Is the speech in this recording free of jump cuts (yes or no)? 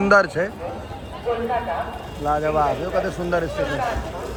yes